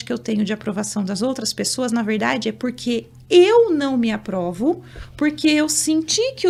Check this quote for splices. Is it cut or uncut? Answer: uncut